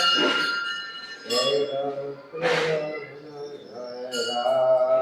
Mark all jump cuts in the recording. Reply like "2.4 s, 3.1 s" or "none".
none